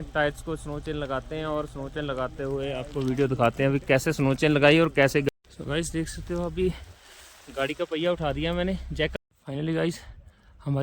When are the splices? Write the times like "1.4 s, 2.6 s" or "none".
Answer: 5.2 s, 9.2 s